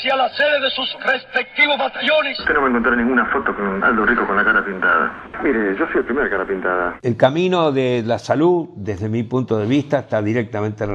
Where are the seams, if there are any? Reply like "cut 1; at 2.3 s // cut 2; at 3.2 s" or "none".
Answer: cut 1; at 2.4 s // cut 2; at 7.0 s